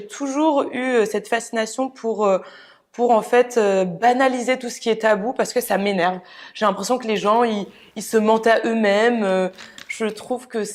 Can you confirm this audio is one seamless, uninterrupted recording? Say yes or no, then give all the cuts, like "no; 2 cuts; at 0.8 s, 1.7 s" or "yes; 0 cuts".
yes; 0 cuts